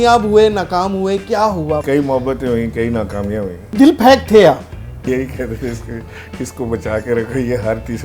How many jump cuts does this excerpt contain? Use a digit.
3